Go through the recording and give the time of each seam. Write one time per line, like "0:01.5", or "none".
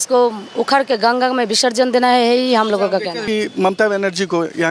0:03.2